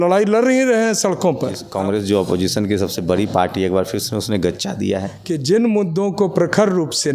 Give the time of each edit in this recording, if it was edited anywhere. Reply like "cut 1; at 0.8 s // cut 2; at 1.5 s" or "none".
cut 1; at 1.6 s // cut 2; at 5.1 s